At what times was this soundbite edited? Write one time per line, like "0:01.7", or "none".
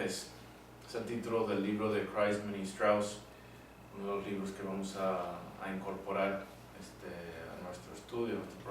0:07.2